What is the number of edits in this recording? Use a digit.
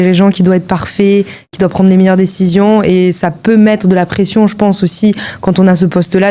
0